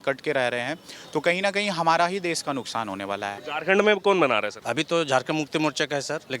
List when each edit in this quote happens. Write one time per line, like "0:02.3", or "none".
0:03.4
0:04.6